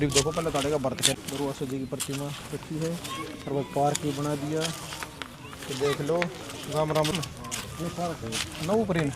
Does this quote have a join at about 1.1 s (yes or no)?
yes